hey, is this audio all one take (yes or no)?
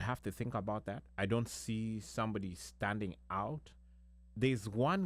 yes